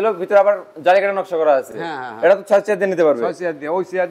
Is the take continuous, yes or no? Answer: yes